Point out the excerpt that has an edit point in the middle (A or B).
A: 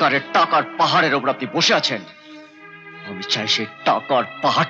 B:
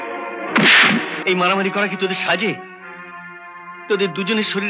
B